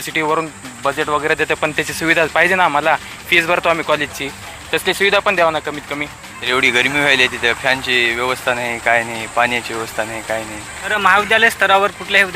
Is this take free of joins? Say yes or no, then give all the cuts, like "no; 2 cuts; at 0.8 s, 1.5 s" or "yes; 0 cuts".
no; 2 cuts; at 6.3 s, 10.9 s